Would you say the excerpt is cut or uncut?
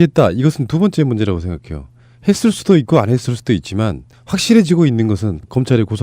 cut